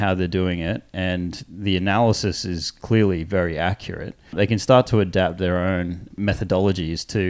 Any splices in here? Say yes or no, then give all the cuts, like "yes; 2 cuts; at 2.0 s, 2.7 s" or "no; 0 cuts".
yes; 3 cuts; at 2.7 s, 4.3 s, 6.1 s